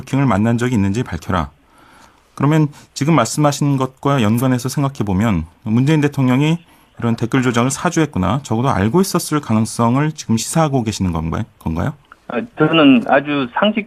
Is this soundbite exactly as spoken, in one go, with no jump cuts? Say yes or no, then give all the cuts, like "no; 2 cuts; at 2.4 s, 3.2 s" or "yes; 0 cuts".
yes; 0 cuts